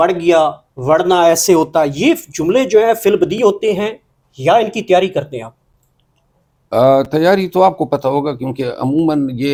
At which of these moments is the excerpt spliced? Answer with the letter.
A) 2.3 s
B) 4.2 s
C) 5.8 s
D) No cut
D